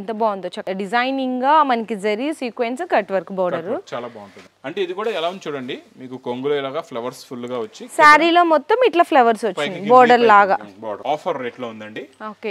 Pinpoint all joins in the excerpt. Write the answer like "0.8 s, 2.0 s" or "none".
4.5 s, 11.0 s